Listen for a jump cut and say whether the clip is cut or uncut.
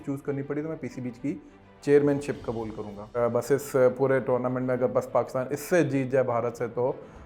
cut